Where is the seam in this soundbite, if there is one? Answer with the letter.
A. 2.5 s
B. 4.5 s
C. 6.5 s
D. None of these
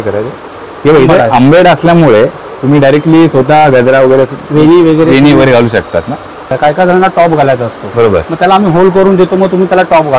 C